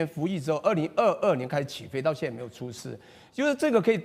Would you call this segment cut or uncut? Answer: uncut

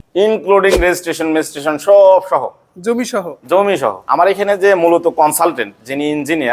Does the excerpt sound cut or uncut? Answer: cut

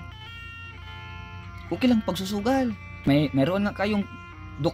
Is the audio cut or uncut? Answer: cut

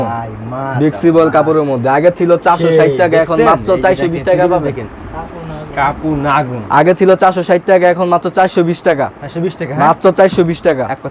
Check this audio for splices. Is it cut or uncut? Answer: uncut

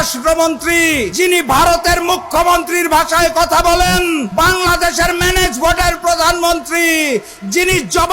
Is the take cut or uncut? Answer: cut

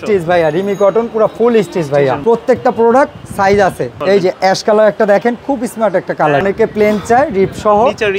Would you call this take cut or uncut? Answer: cut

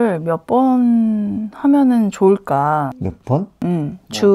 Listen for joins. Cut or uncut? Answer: uncut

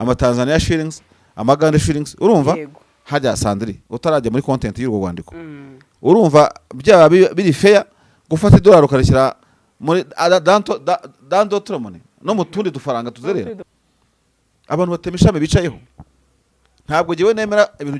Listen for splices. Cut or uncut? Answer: cut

